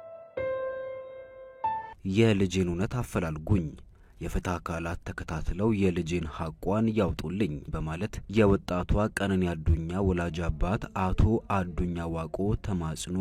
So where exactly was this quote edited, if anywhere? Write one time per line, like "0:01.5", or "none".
0:01.9